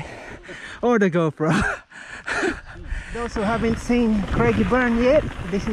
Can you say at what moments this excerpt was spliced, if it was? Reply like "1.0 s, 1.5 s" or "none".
3.3 s